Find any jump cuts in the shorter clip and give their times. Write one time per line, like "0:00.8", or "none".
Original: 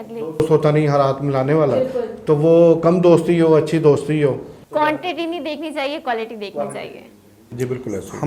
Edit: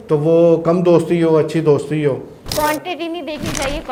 none